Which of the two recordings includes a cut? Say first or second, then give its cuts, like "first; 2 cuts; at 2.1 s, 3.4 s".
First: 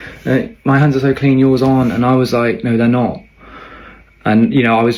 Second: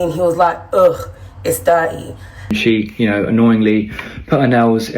second; 1 cut; at 2.6 s